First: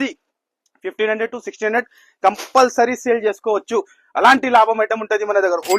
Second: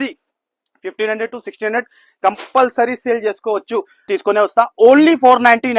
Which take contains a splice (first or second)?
second